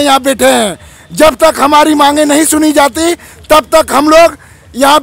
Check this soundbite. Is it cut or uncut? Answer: uncut